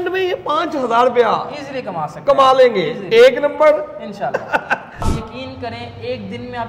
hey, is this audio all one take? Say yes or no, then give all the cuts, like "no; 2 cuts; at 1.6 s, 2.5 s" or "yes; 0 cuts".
no; 1 cut; at 5.1 s